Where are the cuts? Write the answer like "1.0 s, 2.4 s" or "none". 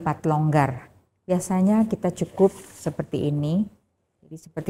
none